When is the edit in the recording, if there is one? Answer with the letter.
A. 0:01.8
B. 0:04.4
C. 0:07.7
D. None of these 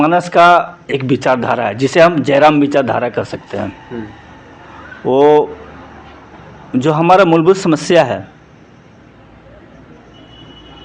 D